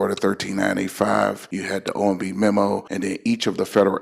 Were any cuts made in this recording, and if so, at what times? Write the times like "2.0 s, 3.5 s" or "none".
1.5 s, 2.9 s